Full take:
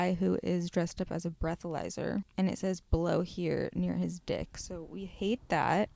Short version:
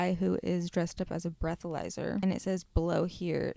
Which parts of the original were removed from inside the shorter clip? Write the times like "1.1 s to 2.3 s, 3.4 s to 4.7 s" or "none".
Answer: 2.2 s to 2.4 s